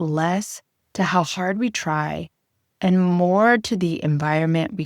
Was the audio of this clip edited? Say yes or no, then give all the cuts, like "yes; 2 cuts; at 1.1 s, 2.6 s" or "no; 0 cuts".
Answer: no; 0 cuts